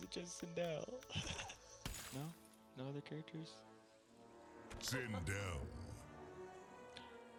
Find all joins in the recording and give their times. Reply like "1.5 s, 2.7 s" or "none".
none